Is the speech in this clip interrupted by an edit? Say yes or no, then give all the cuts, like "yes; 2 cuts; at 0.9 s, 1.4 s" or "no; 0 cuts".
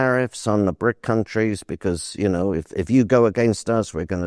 no; 0 cuts